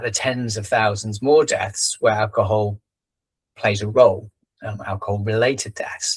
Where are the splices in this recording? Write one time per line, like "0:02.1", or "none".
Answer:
none